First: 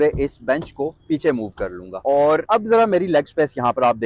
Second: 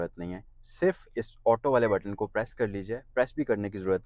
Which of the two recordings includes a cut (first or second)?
first